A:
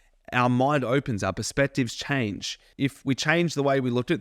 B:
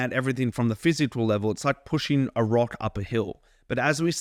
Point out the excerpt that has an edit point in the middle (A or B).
A